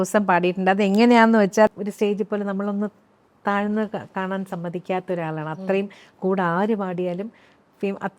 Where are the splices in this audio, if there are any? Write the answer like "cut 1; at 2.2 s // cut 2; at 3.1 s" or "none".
cut 1; at 1.7 s